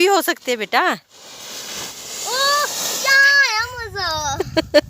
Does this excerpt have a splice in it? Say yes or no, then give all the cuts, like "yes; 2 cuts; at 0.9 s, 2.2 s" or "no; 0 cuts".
no; 0 cuts